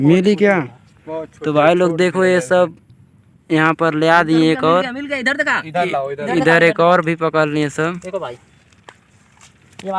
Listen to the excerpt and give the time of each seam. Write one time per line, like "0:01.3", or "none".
none